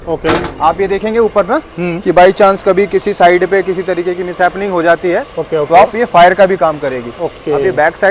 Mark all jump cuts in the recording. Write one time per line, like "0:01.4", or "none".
none